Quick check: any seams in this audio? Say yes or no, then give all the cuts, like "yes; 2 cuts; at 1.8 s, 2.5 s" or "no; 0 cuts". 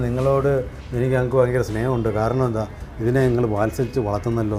no; 0 cuts